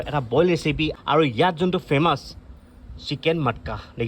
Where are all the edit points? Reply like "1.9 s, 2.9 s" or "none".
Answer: 0.9 s